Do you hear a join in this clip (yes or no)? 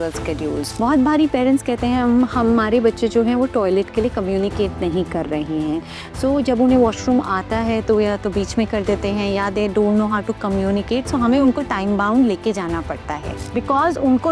yes